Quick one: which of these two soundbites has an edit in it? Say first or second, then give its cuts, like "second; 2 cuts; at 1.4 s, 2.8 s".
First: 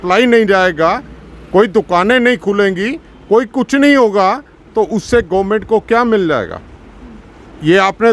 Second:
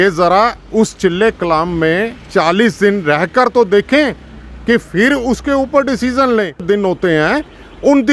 second; 1 cut; at 6.6 s